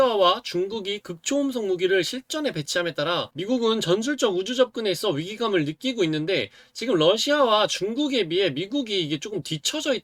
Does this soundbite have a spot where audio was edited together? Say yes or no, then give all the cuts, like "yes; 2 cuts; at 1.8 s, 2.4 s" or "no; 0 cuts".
no; 0 cuts